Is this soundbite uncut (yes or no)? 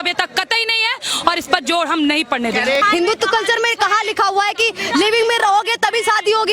yes